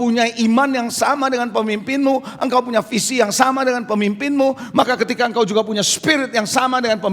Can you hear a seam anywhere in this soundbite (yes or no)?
no